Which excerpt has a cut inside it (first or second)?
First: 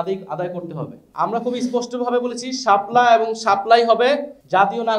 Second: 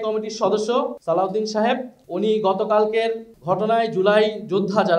first